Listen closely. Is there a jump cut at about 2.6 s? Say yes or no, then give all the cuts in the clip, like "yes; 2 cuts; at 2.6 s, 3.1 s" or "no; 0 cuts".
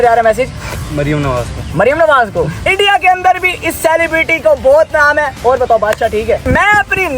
yes; 2 cuts; at 2.6 s, 6.5 s